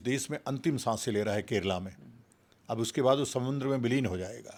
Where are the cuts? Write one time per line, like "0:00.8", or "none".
none